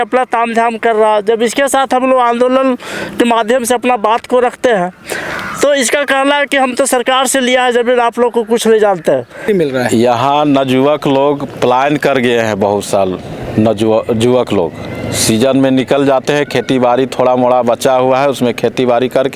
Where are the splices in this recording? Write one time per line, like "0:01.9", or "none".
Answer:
0:09.5